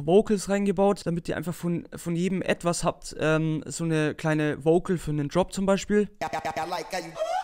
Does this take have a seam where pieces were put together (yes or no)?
no